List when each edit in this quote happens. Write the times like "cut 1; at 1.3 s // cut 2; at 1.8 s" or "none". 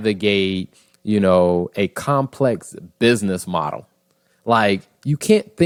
none